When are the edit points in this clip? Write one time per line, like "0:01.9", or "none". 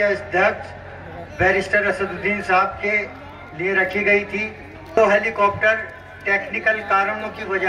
0:05.0